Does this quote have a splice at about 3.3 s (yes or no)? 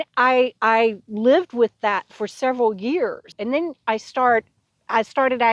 yes